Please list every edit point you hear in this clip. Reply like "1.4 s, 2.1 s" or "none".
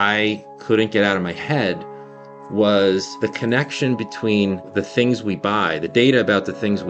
3.1 s, 4.7 s